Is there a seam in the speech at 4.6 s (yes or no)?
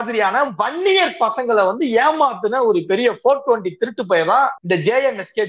yes